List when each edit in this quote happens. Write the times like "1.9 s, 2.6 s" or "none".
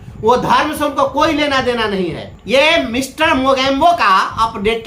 2.3 s